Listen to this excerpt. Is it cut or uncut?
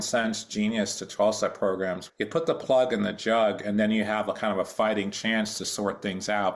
cut